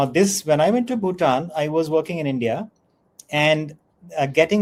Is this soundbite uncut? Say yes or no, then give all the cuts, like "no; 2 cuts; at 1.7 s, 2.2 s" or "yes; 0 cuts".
yes; 0 cuts